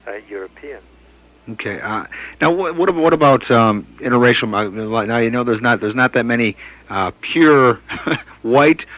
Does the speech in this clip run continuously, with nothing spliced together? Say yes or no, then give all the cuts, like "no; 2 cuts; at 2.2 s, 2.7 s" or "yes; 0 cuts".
no; 1 cut; at 6.7 s